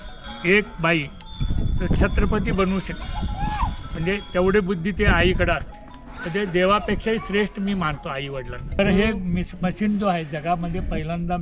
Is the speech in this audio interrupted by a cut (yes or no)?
yes